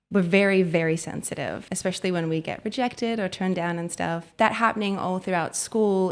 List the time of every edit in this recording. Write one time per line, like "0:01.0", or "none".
0:01.7
0:04.3